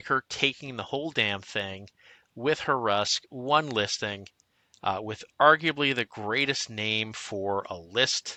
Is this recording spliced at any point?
no; 0 cuts

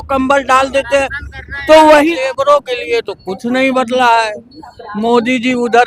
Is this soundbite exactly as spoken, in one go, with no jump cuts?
no; 1 cut; at 2.1 s

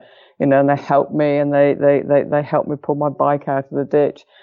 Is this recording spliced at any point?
no; 0 cuts

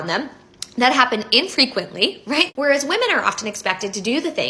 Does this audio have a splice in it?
yes; 1 cut; at 2.5 s

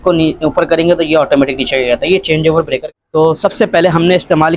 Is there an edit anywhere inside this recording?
yes; 1 cut; at 2.9 s

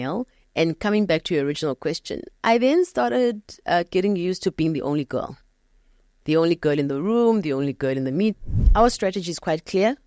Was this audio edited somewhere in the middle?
yes; 1 cut; at 8.4 s

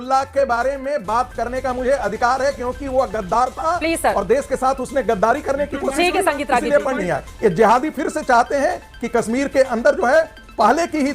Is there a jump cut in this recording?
yes; 1 cut; at 7.0 s

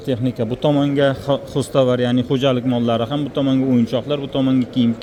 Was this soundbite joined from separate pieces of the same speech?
no; 0 cuts

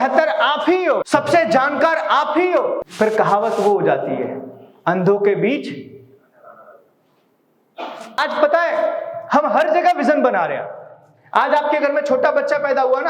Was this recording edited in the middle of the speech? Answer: yes; 3 cuts; at 1.0 s, 2.9 s, 8.2 s

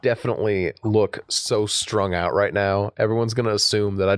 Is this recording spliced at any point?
no; 0 cuts

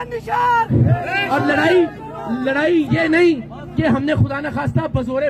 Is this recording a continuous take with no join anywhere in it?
yes; 0 cuts

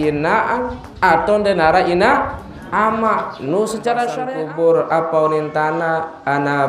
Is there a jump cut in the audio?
yes; 1 cut; at 4.2 s

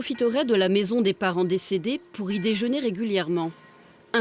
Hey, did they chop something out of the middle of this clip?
no; 0 cuts

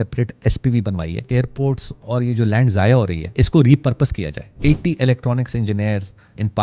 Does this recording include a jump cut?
yes; 3 cuts; at 1.3 s, 3.2 s, 4.5 s

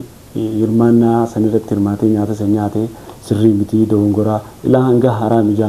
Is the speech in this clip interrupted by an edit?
no; 0 cuts

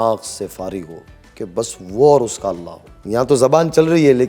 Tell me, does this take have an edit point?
no; 0 cuts

